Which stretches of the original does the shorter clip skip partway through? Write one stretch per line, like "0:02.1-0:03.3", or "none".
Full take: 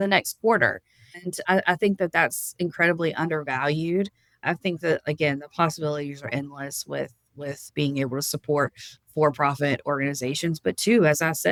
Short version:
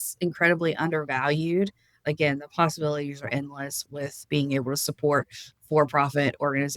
0:04.4-0:05.0
0:06.8-0:07.2